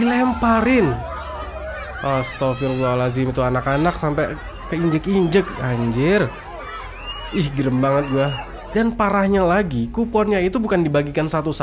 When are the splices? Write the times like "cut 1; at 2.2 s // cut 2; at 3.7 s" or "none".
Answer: cut 1; at 8.6 s